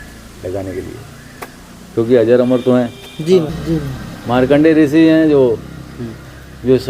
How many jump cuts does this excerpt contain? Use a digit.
1